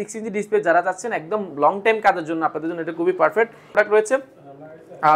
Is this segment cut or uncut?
cut